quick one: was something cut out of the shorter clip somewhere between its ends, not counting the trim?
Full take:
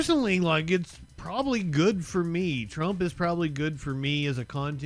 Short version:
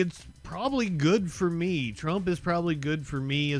no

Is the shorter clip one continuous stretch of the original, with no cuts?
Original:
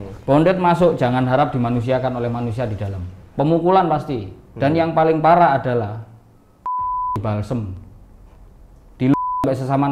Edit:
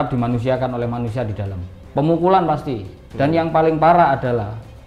yes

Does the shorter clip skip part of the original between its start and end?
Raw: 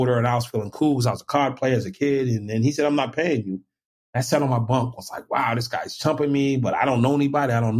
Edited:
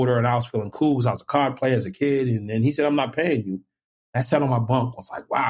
no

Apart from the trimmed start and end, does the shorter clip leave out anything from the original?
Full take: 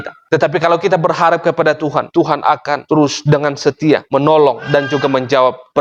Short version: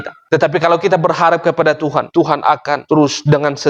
no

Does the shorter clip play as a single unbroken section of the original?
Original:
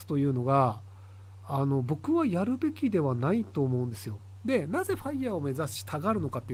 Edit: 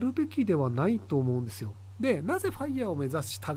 yes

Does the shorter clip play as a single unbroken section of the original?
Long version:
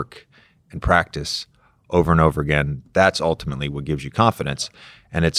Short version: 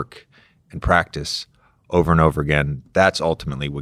yes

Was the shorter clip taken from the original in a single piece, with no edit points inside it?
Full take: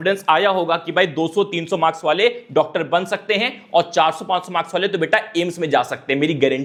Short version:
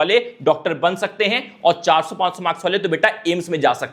yes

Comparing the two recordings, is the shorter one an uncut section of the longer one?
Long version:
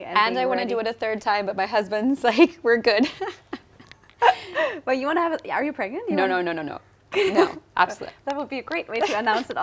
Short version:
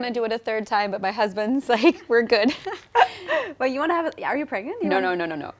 no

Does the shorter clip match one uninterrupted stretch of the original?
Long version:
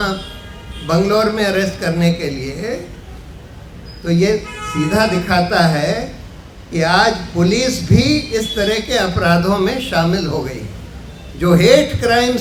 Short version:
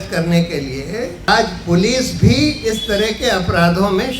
no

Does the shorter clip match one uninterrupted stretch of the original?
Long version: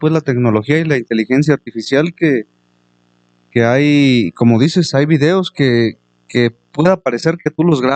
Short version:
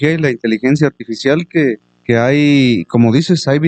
no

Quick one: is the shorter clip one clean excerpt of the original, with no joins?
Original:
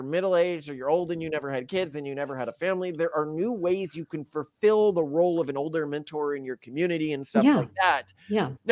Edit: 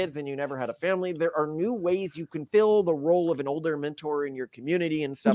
no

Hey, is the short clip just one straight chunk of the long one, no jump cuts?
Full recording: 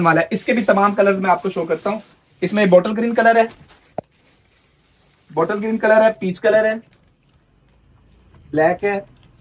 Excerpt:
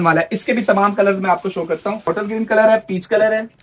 no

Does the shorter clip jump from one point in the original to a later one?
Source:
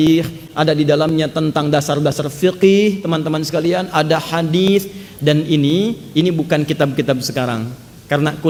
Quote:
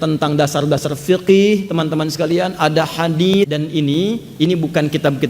yes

